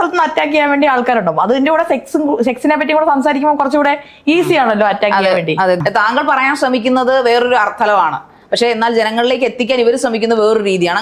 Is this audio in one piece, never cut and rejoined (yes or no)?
no